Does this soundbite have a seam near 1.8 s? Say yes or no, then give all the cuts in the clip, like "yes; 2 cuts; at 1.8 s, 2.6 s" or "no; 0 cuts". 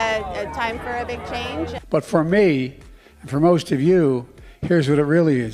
yes; 1 cut; at 1.8 s